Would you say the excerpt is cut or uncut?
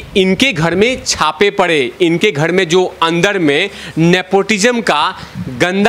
uncut